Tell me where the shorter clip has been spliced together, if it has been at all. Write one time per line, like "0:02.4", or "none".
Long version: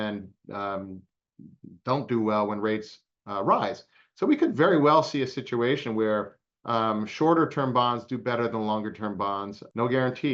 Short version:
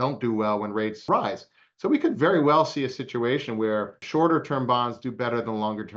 0:01.0
0:04.0